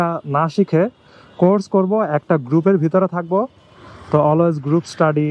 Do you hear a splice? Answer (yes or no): no